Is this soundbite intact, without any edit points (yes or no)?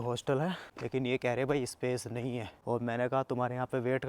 no